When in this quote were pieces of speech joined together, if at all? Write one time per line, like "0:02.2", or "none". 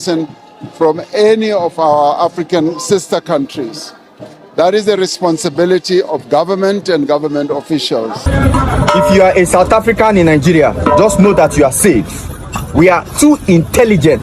0:08.3